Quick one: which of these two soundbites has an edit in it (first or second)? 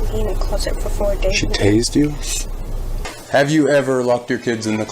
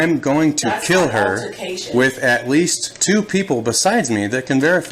first